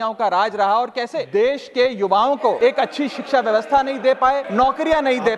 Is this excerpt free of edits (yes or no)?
no